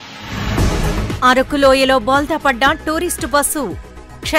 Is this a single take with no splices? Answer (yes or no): no